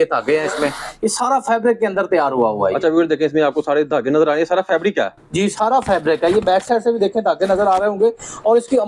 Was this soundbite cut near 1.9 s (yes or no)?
no